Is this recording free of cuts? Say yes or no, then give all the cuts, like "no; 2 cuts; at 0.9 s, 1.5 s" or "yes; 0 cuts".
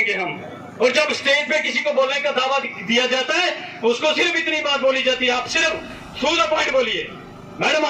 yes; 0 cuts